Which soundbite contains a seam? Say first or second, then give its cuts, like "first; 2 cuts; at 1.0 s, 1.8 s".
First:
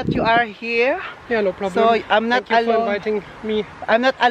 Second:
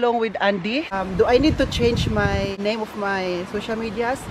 second; 2 cuts; at 0.9 s, 2.6 s